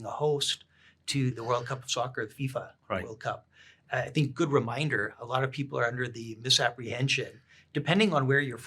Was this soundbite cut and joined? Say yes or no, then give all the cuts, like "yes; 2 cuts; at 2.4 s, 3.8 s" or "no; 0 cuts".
yes; 1 cut; at 1.4 s